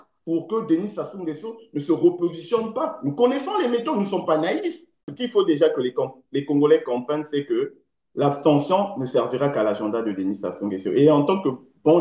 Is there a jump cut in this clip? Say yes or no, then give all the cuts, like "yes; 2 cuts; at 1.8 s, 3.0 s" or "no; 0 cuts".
yes; 1 cut; at 5.1 s